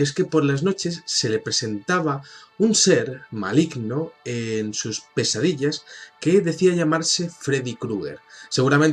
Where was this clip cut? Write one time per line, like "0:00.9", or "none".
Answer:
none

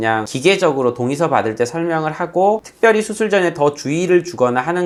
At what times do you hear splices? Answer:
none

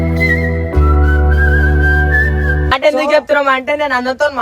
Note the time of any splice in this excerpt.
0:02.7

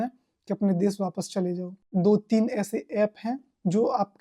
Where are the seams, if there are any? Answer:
0:01.9

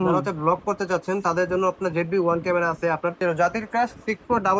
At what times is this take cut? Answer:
0:03.2

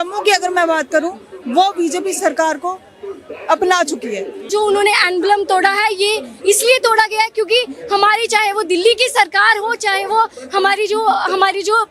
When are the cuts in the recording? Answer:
0:04.5

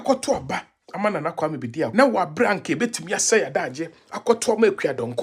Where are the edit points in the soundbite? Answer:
0:01.9

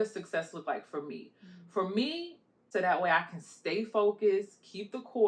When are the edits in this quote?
0:02.6

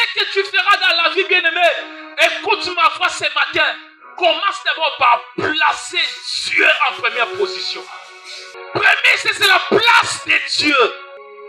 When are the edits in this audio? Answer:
0:08.5

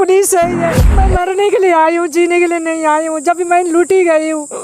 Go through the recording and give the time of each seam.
0:00.9

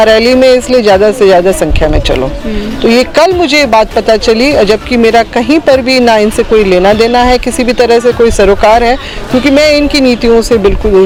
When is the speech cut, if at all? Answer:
none

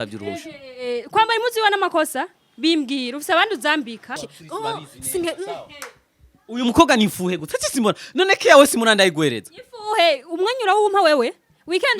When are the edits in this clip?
0:04.3

